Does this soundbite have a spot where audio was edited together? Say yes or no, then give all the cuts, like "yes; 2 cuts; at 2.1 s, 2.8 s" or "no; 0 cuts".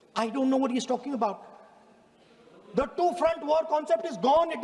no; 0 cuts